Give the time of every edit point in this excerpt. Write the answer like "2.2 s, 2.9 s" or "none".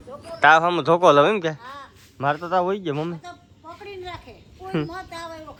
none